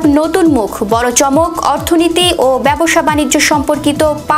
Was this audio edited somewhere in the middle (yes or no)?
no